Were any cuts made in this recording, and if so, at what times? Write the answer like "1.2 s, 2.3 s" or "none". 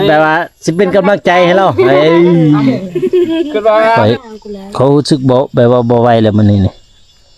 4.0 s